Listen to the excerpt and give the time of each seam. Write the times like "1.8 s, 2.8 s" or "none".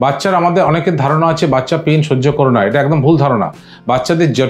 none